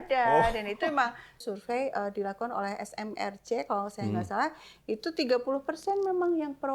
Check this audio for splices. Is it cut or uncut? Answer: cut